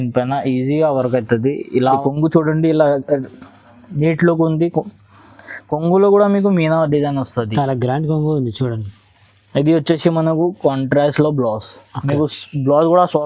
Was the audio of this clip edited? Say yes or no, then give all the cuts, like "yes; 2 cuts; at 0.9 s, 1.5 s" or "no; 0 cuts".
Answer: yes; 1 cut; at 2.0 s